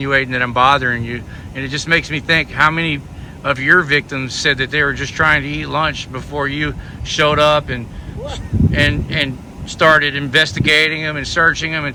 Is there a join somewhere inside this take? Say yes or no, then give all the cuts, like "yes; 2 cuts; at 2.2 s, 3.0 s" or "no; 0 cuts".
no; 0 cuts